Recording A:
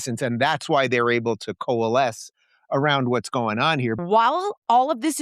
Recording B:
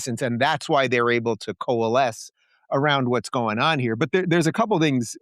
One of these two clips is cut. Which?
A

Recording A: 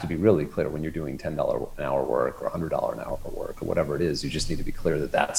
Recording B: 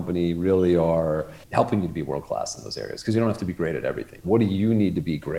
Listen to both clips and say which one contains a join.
B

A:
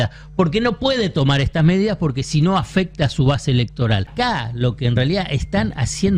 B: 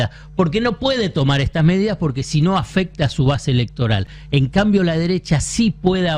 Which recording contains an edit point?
A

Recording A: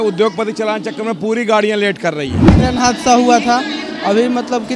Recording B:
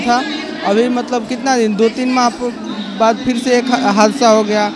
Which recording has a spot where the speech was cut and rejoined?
A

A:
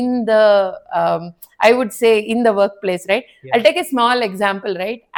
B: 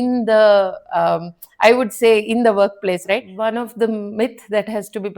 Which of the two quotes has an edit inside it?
B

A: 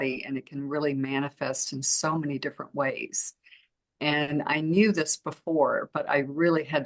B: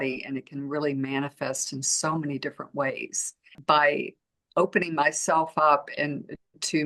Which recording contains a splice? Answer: B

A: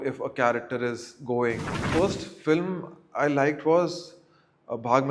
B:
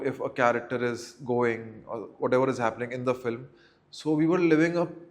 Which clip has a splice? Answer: A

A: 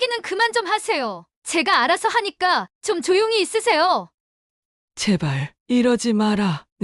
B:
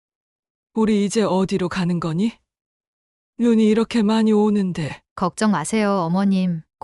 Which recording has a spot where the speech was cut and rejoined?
A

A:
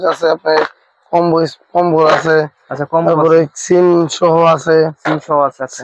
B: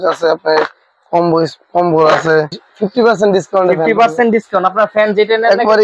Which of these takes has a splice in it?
B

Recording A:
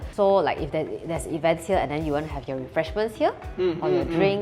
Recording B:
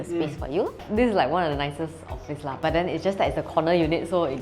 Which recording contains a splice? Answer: B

